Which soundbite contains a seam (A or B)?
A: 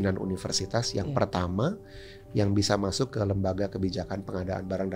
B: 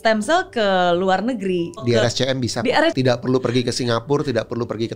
B